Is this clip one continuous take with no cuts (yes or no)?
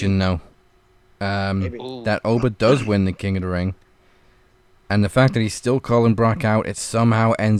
yes